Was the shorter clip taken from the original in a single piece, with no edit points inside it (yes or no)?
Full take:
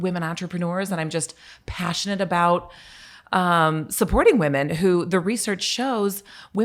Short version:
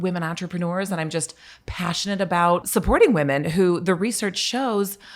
no